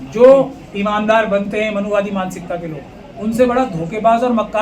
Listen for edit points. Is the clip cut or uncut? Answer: uncut